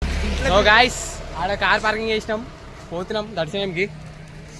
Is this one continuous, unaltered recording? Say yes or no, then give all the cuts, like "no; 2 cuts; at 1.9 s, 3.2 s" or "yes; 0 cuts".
yes; 0 cuts